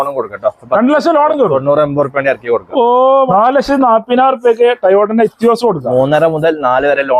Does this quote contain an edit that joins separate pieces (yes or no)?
yes